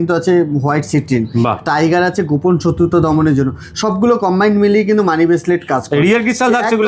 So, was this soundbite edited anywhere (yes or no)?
no